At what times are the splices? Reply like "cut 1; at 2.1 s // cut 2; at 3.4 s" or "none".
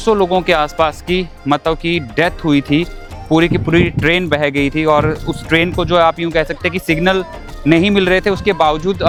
none